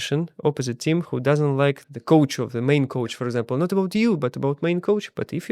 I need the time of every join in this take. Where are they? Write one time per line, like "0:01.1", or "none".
0:01.8